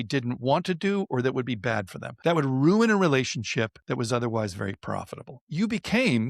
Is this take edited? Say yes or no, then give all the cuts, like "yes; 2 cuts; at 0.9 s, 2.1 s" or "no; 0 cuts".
yes; 3 cuts; at 2.1 s, 3.8 s, 5.4 s